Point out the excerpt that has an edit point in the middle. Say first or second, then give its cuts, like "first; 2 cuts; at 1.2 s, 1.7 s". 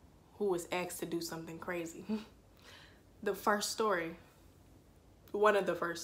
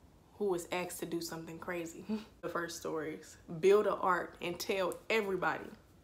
second; 1 cut; at 2.5 s